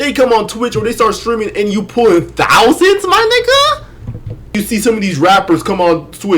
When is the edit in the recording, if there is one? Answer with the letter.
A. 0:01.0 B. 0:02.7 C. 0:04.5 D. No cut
C